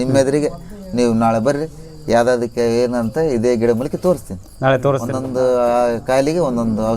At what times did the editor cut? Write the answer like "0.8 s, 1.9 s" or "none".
5.1 s